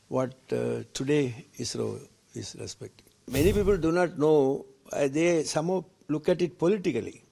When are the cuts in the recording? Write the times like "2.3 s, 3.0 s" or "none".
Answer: 3.3 s